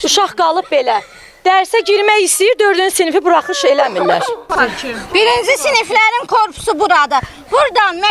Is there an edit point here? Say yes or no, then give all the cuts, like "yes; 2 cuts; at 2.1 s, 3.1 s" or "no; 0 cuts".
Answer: yes; 1 cut; at 4.4 s